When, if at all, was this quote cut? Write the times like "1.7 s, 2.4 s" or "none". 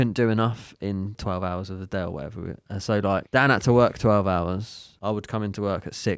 1.2 s, 3.3 s, 4.8 s